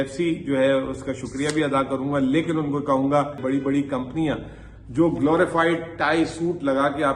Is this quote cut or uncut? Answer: cut